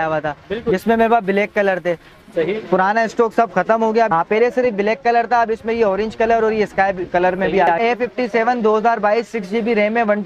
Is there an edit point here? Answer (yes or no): yes